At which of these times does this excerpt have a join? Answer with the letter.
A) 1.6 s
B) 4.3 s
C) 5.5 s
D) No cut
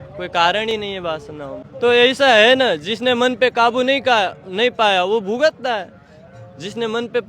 A